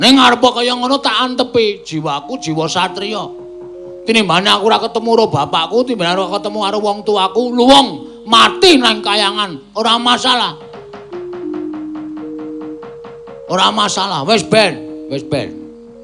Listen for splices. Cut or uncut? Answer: uncut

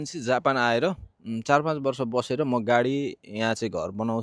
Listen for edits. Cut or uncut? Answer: uncut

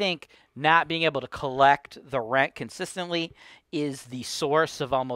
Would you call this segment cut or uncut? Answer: uncut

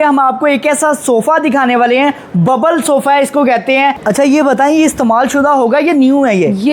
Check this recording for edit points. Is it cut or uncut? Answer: cut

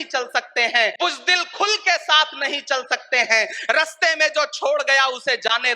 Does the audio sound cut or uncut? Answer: cut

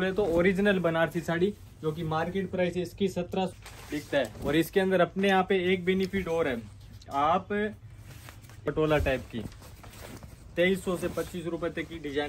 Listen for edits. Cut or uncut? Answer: cut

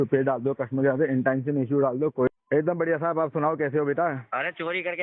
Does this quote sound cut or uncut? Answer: cut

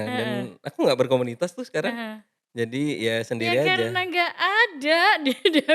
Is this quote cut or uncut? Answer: uncut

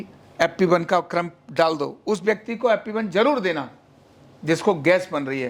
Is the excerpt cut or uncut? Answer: uncut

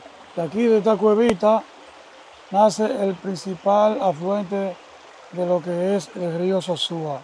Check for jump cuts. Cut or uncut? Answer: cut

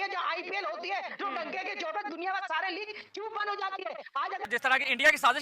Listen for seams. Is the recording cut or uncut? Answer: cut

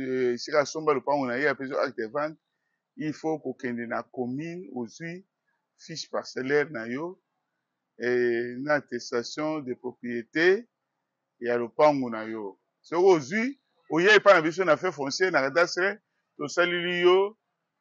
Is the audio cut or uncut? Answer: uncut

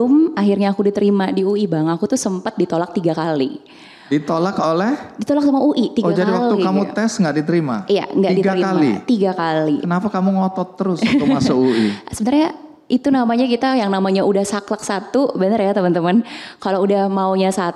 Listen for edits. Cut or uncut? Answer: uncut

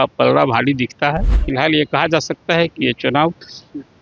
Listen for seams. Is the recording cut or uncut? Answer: cut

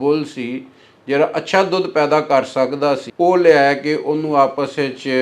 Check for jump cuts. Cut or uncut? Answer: cut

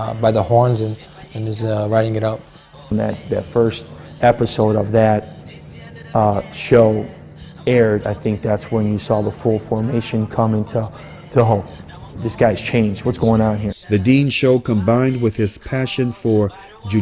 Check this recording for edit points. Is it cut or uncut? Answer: uncut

